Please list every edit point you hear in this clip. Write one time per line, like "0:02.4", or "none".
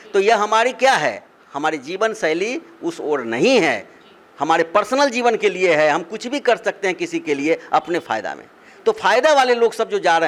none